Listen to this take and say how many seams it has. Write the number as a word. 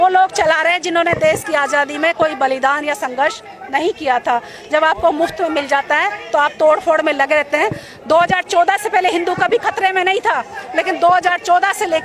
zero